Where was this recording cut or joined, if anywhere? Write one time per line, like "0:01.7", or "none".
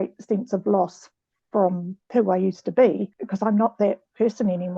0:01.9
0:03.2